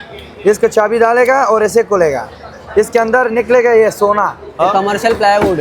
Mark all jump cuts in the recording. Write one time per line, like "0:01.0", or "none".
0:04.6